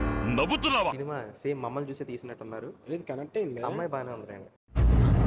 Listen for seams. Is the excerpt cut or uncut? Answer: cut